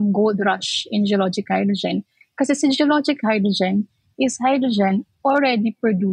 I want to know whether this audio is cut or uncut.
uncut